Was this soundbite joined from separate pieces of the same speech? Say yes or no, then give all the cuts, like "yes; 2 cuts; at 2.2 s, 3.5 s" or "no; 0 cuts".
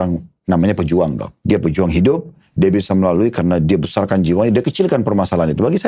yes; 1 cut; at 1.3 s